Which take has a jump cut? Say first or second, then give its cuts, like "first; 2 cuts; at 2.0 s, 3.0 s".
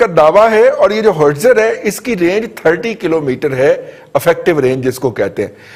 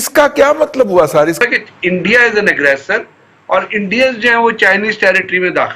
second; 1 cut; at 1.4 s